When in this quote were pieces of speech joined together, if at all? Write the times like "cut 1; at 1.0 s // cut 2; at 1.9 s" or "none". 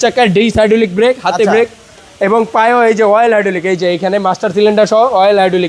none

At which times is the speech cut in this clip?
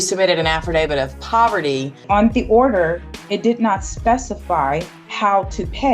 cut 1; at 2.0 s // cut 2; at 5.0 s

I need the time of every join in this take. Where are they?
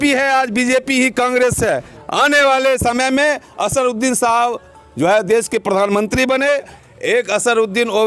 cut 1; at 1.9 s // cut 2; at 6.8 s

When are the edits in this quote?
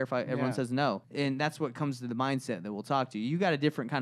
cut 1; at 1.1 s

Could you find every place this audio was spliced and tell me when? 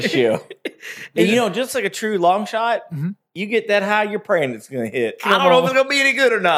cut 1; at 1.1 s

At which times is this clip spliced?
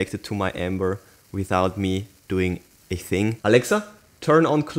cut 1; at 3.4 s

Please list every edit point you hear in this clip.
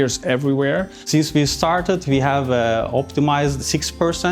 cut 1; at 1.0 s

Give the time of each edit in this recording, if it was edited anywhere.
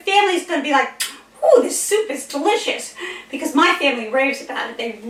none

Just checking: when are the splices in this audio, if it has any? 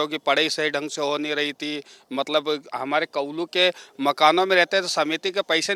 none

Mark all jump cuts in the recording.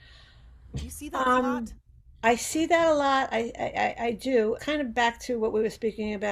cut 1; at 4.6 s

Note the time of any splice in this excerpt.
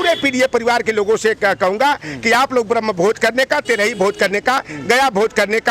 none

